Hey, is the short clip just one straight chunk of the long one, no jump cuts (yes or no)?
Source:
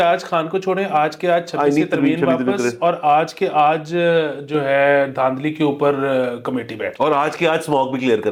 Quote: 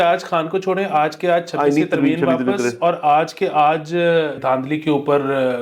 no